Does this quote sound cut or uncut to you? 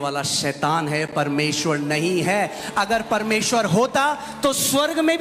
uncut